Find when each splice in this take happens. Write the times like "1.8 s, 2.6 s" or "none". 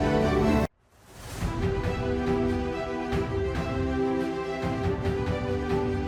none